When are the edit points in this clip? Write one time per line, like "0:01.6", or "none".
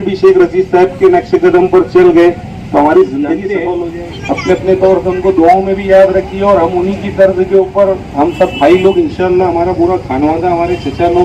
0:03.8